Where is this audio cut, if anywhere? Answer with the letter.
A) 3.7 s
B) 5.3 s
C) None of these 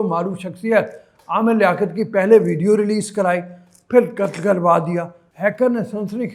C